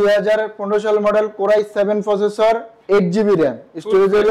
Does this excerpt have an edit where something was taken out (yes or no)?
no